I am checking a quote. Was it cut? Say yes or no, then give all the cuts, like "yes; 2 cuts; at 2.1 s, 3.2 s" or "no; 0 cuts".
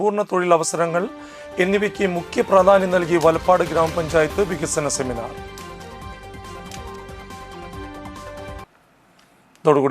no; 0 cuts